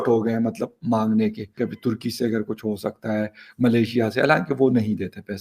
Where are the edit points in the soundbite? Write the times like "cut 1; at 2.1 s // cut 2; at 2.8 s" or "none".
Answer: cut 1; at 1.5 s